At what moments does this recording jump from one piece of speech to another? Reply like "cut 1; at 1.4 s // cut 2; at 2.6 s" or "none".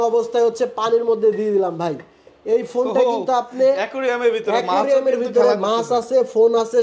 none